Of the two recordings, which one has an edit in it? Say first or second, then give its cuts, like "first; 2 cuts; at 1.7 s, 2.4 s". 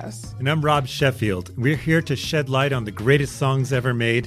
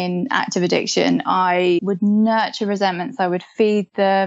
second; 1 cut; at 1.8 s